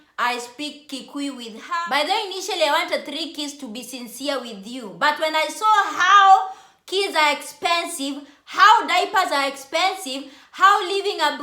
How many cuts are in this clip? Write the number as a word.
one